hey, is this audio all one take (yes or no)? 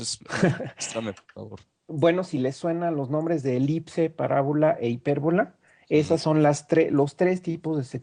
no